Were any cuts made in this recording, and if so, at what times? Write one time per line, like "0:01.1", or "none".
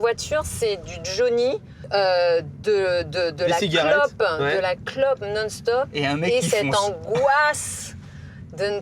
0:01.7